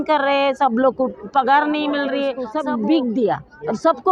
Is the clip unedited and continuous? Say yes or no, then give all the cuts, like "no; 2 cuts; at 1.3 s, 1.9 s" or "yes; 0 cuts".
no; 1 cut; at 2.4 s